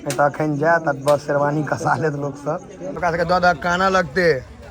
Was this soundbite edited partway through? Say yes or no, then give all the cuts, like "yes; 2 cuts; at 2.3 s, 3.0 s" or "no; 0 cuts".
yes; 1 cut; at 2.9 s